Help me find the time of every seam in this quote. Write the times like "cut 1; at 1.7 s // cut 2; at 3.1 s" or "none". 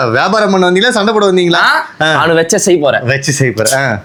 none